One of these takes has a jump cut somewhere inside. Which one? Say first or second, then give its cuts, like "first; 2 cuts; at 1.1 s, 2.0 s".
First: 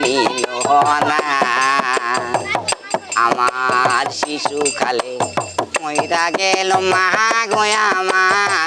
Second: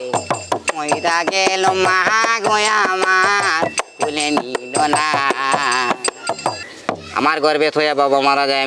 second; 1 cut; at 6.6 s